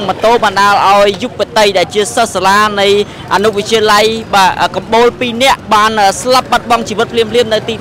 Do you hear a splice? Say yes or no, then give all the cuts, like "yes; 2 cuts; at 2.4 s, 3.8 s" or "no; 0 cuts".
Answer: yes; 1 cut; at 5.6 s